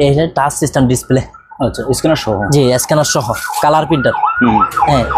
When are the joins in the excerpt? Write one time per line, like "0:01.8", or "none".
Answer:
none